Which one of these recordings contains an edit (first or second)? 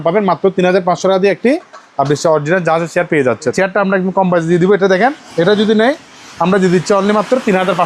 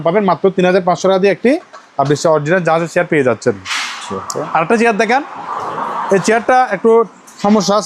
first